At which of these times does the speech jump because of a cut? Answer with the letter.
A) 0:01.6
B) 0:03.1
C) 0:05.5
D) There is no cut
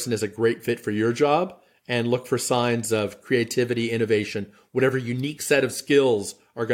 D